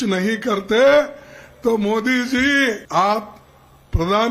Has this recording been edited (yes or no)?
yes